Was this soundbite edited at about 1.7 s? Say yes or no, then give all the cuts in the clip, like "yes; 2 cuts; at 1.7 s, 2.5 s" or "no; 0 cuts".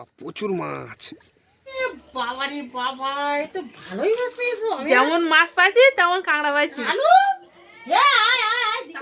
yes; 2 cuts; at 1.7 s, 6.8 s